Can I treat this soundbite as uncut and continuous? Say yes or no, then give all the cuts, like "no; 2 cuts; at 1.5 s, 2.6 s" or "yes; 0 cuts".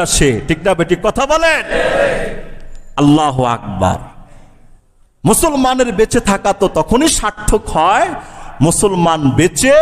yes; 0 cuts